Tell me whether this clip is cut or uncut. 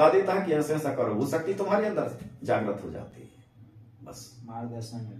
uncut